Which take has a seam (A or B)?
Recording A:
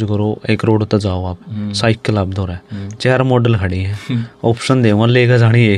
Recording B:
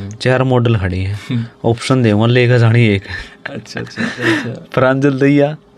B